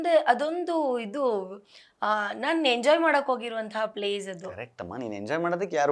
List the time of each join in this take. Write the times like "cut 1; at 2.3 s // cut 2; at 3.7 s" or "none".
none